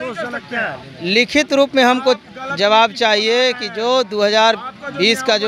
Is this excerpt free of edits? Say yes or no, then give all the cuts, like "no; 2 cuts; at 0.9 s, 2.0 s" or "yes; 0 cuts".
yes; 0 cuts